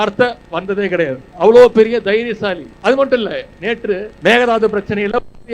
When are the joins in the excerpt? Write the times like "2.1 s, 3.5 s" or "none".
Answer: 1.3 s, 2.7 s, 4.1 s